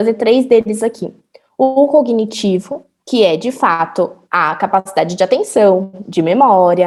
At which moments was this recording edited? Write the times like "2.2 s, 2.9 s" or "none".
none